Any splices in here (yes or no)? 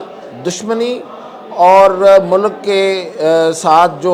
no